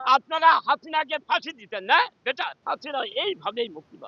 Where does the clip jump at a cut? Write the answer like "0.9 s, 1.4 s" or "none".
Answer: 2.6 s